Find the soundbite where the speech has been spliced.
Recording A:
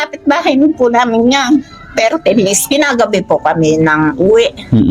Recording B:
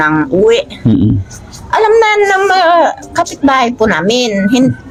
A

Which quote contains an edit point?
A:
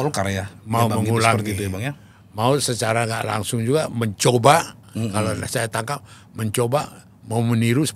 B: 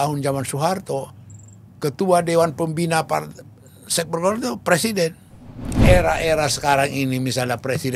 B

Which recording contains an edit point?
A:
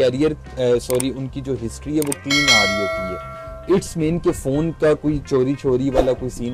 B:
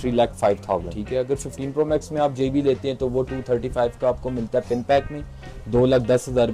B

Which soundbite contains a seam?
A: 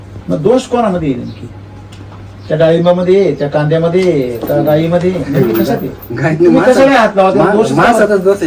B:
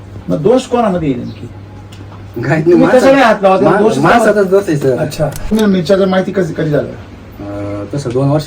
B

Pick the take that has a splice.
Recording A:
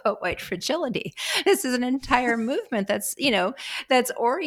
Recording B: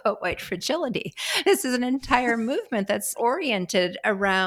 B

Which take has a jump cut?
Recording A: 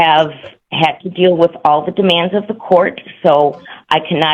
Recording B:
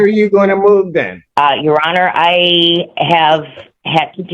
B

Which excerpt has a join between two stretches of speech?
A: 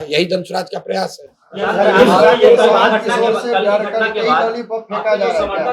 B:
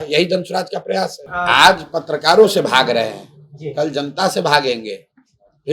B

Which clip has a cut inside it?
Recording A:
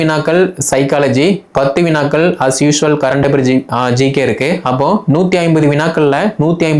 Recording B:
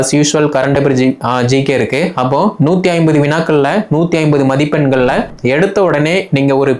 B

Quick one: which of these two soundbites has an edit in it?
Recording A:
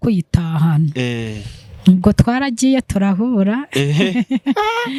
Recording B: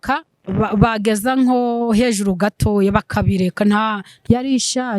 B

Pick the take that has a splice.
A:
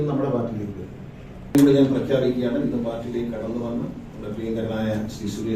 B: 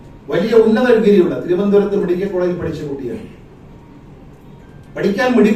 A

